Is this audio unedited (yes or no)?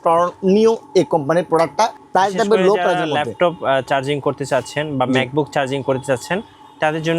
no